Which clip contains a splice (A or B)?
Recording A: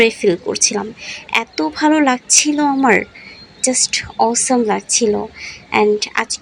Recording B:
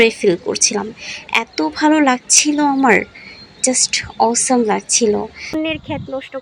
B